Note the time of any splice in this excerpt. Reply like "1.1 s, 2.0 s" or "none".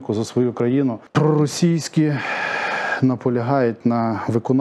1.0 s